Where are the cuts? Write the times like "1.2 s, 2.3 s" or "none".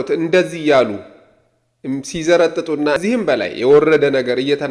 3.0 s